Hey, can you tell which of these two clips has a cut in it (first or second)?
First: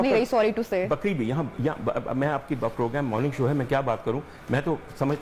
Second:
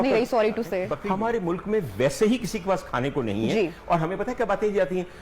second